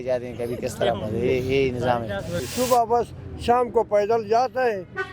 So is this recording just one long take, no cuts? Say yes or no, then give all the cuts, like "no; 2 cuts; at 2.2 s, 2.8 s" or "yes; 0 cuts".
no; 1 cut; at 2.5 s